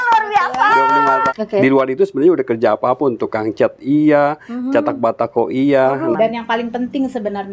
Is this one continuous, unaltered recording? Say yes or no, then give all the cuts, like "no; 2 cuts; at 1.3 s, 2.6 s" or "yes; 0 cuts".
no; 2 cuts; at 1.3 s, 6.1 s